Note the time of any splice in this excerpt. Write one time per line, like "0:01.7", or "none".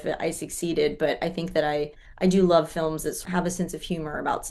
0:03.2